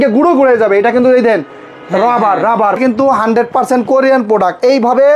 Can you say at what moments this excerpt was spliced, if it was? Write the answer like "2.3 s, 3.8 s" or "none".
2.8 s